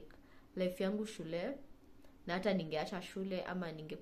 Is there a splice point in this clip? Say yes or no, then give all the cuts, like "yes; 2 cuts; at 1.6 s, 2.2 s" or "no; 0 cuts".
no; 0 cuts